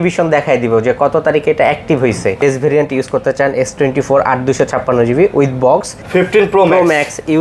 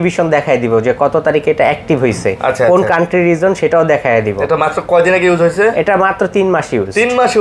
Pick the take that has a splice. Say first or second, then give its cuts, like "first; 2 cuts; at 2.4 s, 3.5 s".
first; 2 cuts; at 2.4 s, 6.0 s